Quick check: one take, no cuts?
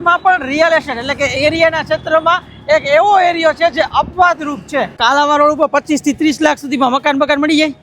no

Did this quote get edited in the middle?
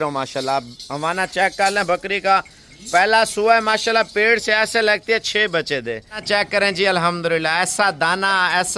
yes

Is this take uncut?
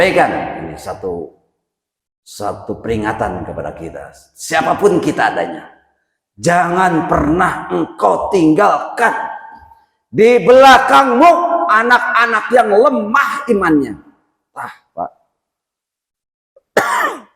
yes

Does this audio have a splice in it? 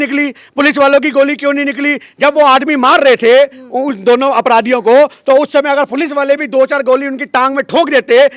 no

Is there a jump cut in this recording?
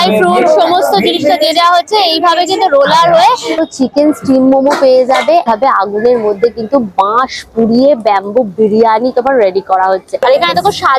yes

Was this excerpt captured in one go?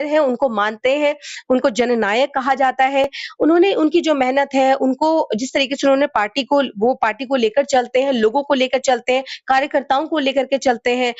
yes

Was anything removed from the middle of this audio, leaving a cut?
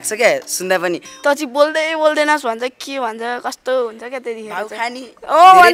yes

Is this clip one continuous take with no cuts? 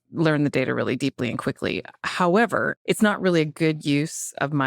no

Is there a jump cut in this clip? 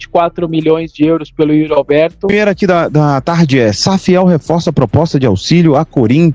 yes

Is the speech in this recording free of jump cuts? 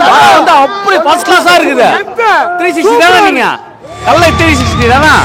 yes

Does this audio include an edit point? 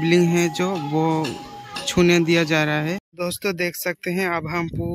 yes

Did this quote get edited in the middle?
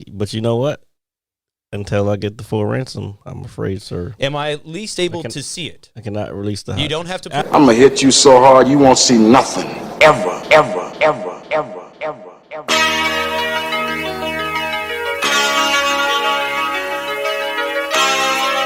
yes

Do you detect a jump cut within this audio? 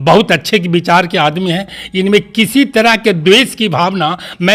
no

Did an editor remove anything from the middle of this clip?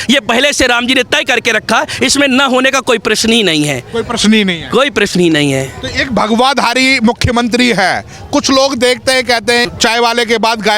no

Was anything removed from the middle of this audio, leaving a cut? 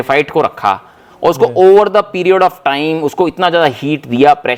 no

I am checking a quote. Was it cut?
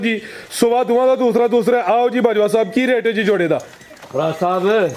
no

